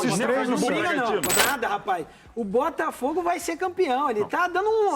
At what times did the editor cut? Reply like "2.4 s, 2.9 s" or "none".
1.4 s